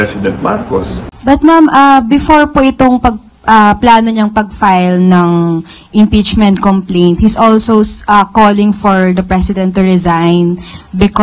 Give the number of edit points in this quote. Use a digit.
1